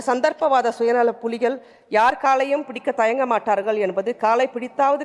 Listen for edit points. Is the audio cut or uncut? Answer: uncut